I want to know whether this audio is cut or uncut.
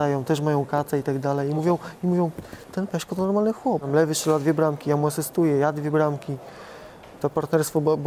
cut